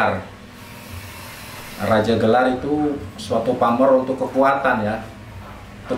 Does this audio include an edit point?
no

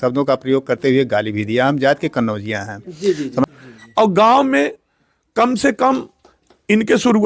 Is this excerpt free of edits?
no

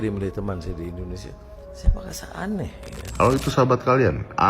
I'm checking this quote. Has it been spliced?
yes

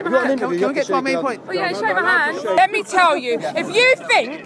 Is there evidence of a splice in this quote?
yes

